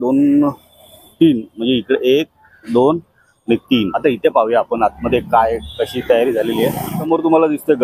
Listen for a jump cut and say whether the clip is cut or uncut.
cut